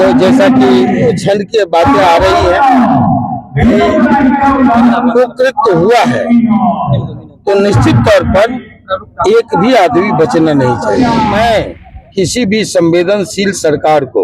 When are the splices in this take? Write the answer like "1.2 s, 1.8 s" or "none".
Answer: 11.3 s